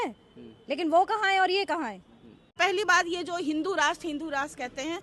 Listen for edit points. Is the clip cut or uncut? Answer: cut